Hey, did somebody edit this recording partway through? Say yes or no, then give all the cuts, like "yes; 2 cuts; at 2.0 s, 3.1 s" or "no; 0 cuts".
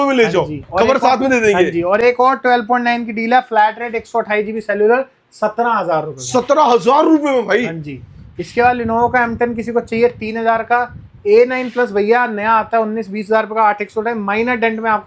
no; 0 cuts